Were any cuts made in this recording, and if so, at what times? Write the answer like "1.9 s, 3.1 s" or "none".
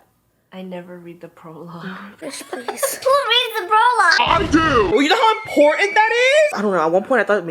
6.5 s

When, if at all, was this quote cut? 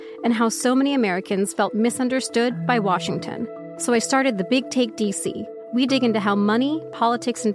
3.7 s, 5.5 s

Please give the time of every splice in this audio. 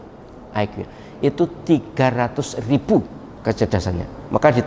3.2 s

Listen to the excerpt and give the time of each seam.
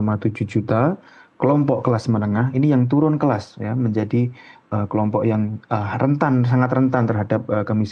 none

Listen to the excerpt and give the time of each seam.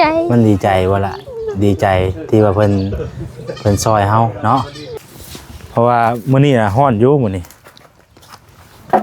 4.8 s

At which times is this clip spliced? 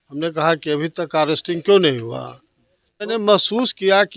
3.1 s

